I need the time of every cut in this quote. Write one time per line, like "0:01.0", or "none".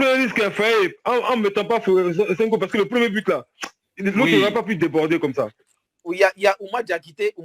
0:05.7